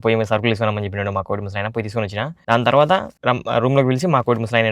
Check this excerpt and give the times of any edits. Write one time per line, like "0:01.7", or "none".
0:02.4
0:03.1

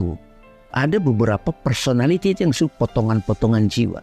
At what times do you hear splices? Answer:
none

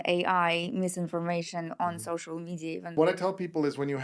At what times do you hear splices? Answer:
0:03.0

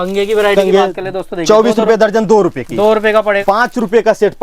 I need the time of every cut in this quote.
0:03.4

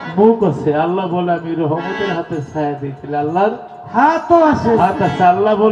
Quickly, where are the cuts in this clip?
none

